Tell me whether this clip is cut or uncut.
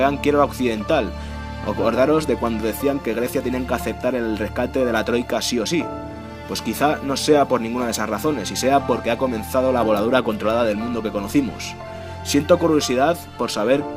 cut